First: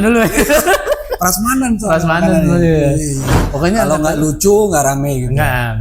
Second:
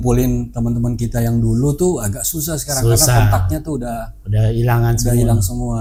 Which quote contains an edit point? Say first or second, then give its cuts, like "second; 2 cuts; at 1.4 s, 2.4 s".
first; 1 cut; at 3.4 s